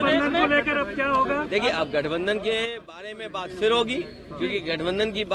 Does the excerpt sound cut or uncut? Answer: uncut